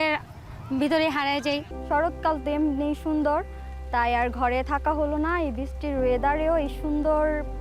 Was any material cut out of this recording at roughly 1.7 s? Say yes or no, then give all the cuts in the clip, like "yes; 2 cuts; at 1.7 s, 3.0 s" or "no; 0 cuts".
yes; 1 cut; at 1.7 s